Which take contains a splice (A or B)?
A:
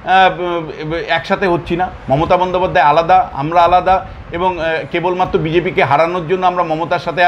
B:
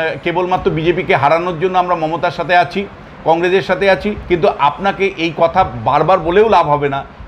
B